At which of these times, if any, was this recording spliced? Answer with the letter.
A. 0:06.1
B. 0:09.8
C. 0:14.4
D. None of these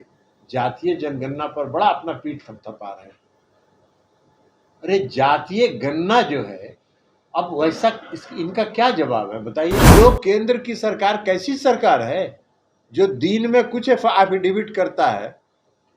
B